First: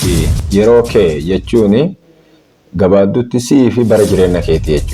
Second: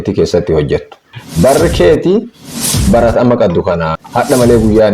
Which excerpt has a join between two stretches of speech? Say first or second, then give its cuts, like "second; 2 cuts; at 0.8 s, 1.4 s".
second; 2 cuts; at 1.1 s, 4.0 s